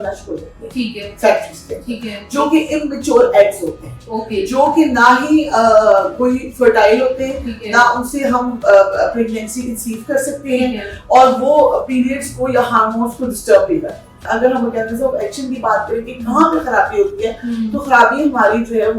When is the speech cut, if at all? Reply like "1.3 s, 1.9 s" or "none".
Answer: 14.3 s